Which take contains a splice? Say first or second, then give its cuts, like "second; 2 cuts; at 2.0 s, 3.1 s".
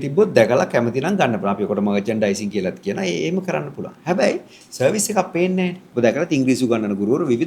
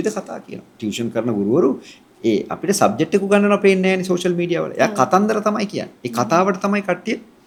first; 1 cut; at 5.8 s